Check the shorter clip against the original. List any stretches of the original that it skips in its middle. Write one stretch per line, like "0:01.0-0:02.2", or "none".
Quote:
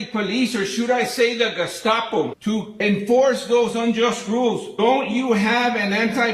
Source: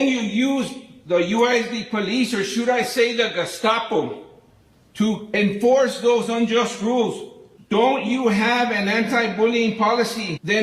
0:04.1-0:04.9
0:07.2-0:07.6